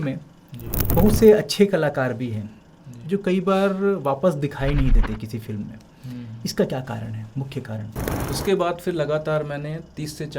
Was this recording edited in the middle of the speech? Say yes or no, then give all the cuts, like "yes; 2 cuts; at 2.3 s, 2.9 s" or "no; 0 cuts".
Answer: yes; 1 cut; at 8.1 s